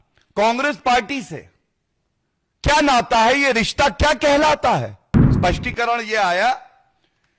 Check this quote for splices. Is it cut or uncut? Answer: cut